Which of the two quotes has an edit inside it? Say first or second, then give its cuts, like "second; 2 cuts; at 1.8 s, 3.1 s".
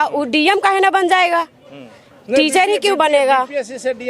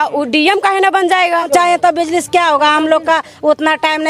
second; 1 cut; at 1.5 s